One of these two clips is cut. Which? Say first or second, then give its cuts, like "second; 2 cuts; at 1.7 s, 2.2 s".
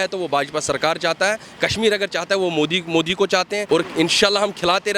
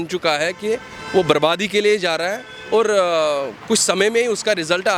first; 1 cut; at 3.6 s